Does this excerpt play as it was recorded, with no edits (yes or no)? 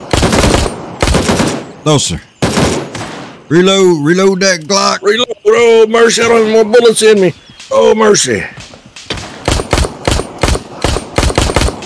yes